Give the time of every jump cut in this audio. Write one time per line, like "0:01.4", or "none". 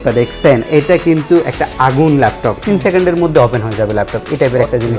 0:02.6